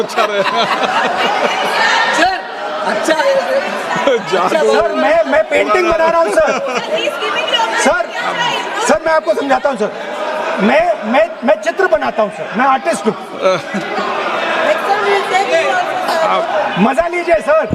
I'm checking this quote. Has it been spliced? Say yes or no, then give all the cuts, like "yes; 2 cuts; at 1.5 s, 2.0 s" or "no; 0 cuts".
no; 0 cuts